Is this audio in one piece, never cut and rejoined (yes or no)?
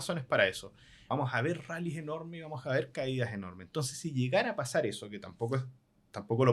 no